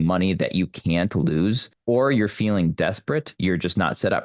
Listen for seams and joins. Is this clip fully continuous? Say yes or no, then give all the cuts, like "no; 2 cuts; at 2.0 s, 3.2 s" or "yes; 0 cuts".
no; 2 cuts; at 1.7 s, 3.3 s